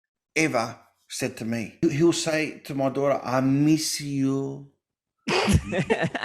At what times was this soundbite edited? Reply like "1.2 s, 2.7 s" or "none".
1.7 s